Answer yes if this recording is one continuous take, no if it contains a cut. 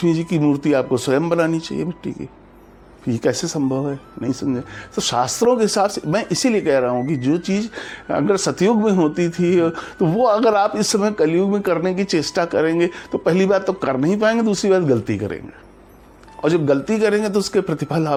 yes